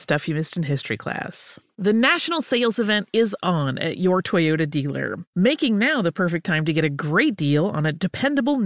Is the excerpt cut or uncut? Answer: uncut